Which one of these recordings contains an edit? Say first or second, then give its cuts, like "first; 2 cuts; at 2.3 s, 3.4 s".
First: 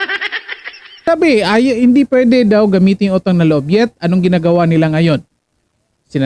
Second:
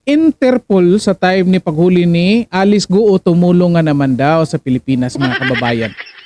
first; 1 cut; at 1.1 s